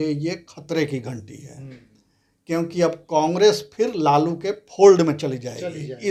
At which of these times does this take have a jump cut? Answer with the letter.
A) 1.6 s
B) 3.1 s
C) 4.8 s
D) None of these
D